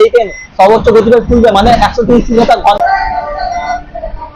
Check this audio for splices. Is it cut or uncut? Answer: cut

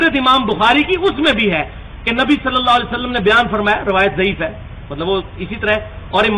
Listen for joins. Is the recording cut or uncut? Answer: uncut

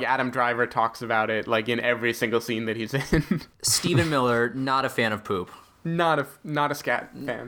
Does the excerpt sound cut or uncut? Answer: cut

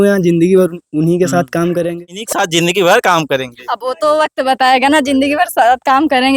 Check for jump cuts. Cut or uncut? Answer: cut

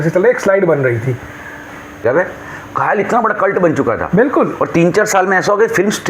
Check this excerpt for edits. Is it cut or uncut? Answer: cut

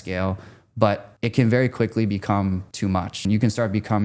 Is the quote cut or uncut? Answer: cut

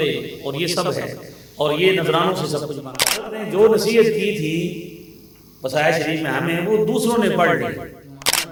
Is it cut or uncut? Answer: uncut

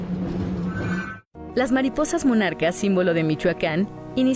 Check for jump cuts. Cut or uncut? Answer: cut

